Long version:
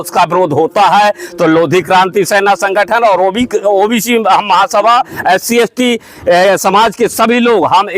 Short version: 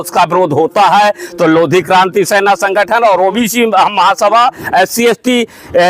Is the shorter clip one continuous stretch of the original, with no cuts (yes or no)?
no